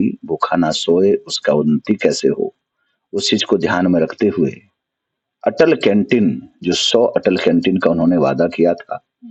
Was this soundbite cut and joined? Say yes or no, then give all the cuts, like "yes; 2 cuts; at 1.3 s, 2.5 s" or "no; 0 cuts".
no; 0 cuts